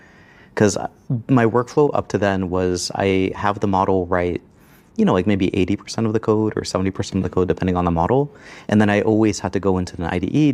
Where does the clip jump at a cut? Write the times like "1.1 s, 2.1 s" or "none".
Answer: none